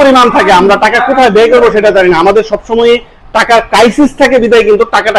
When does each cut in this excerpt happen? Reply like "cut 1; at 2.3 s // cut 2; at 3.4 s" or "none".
none